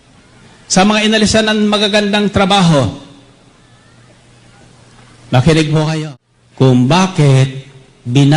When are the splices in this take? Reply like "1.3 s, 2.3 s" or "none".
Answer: 6.0 s